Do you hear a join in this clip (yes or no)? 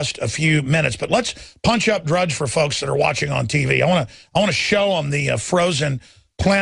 no